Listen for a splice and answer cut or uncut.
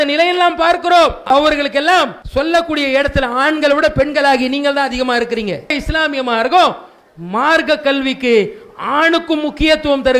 cut